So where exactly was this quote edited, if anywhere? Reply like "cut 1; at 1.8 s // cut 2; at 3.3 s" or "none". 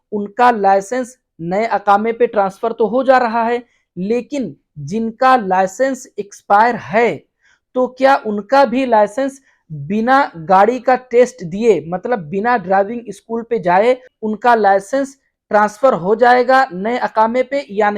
cut 1; at 14.1 s